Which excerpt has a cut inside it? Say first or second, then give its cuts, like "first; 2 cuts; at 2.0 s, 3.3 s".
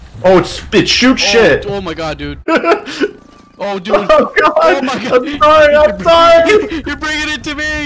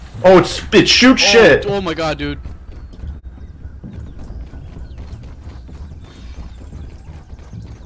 first; 1 cut; at 2.4 s